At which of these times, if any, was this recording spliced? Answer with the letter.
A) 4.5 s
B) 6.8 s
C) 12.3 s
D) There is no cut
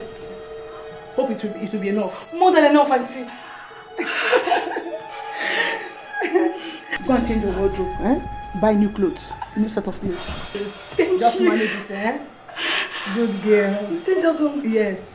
D